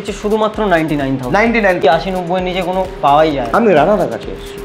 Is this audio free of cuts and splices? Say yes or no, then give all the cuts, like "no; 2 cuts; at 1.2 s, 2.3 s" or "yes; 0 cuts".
no; 1 cut; at 1.8 s